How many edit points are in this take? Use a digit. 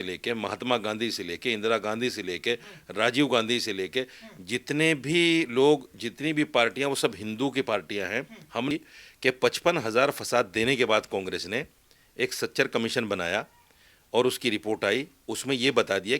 1